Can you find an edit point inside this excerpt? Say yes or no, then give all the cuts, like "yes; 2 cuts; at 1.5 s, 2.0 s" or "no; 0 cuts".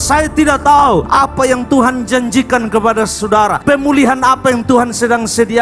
no; 0 cuts